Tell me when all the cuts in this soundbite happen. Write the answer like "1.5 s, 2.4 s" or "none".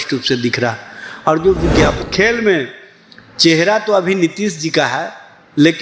2.0 s